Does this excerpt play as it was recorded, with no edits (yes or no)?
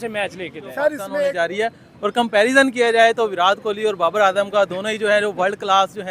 no